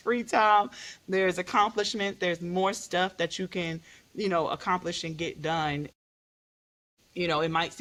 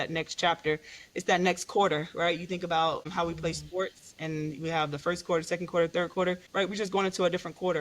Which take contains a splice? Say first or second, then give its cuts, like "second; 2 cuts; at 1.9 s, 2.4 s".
second; 2 cuts; at 3.1 s, 6.4 s